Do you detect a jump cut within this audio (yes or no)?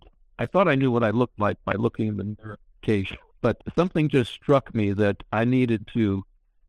no